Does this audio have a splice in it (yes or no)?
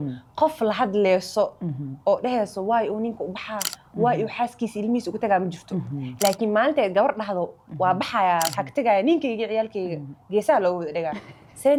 no